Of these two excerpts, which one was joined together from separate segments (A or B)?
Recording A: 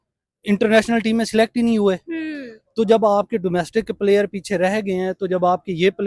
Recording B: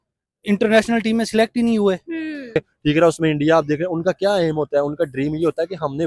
B